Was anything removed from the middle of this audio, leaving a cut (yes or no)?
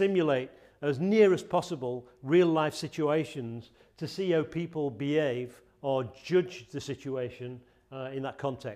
no